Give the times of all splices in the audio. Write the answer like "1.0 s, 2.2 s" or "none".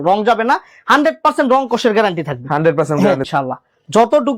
3.2 s